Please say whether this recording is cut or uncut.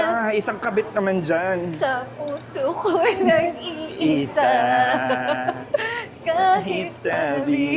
uncut